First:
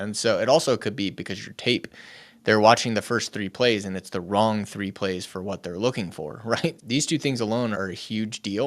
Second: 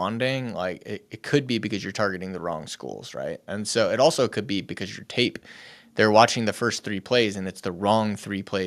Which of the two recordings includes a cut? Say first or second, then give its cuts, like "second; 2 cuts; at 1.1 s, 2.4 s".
first; 2 cuts; at 6.8 s, 7.8 s